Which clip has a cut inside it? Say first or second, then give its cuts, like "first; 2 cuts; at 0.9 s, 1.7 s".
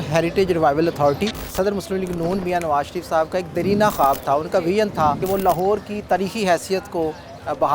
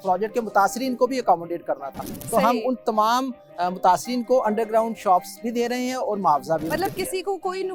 first; 2 cuts; at 1.4 s, 5.2 s